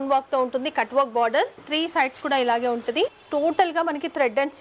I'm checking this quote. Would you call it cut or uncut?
cut